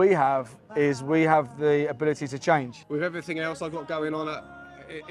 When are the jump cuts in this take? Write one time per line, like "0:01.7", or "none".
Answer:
0:02.8

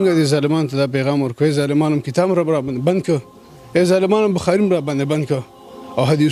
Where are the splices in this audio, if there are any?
none

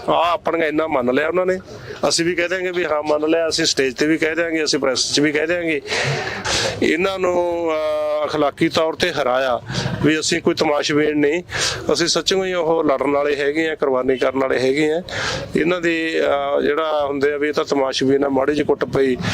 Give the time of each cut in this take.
0:06.4

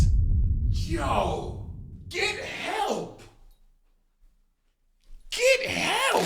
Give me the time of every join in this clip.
none

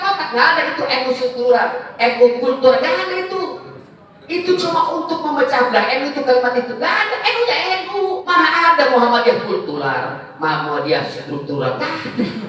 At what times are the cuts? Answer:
0:08.2

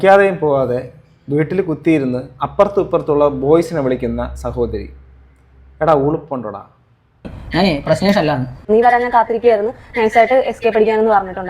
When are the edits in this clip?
0:07.4

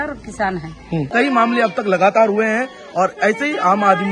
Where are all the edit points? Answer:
0:01.1

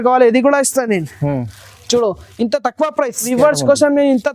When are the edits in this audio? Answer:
0:03.3

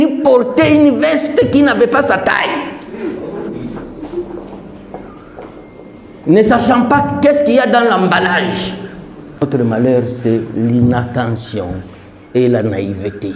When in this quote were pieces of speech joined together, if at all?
0:09.4

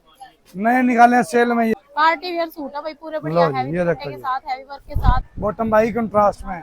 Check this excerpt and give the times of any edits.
0:01.8
0:05.3

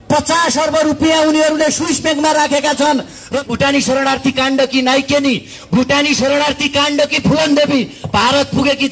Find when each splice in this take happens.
0:03.4

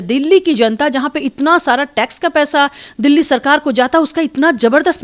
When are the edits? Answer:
none

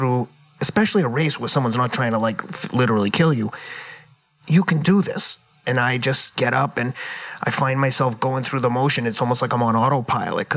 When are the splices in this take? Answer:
0:06.3

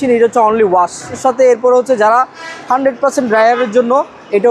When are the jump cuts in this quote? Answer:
0:01.2

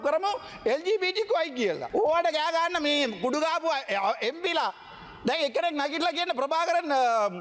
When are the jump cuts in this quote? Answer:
0:01.8

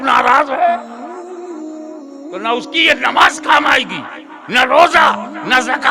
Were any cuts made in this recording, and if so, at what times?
none

